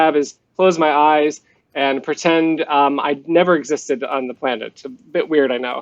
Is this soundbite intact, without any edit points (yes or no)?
yes